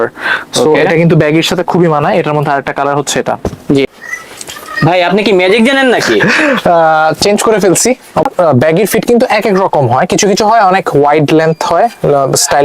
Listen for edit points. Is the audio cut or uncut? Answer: cut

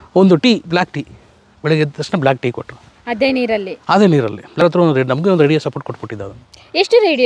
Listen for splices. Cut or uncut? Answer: cut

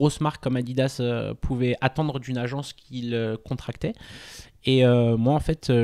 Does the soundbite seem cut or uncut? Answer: uncut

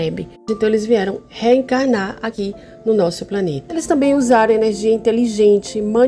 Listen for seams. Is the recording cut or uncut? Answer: cut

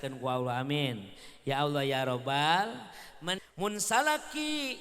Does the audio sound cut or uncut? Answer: cut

